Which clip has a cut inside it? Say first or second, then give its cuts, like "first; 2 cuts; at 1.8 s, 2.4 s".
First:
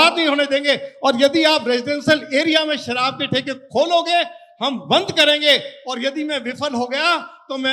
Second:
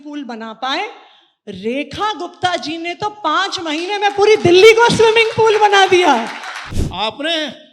second; 1 cut; at 6.6 s